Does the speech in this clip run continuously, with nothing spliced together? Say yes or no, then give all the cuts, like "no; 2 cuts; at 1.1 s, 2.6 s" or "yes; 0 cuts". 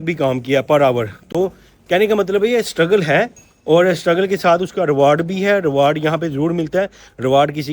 yes; 0 cuts